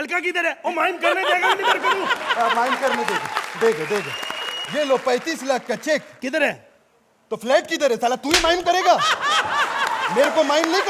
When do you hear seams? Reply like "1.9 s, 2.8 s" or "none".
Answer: none